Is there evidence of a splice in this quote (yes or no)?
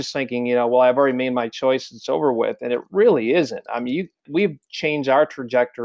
yes